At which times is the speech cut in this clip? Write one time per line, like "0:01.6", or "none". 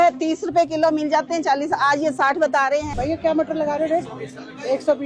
0:02.9